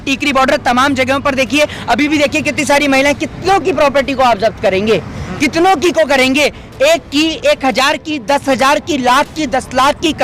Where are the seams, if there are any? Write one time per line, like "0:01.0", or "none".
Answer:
none